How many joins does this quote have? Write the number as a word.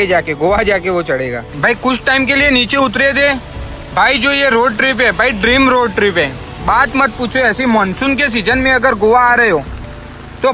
one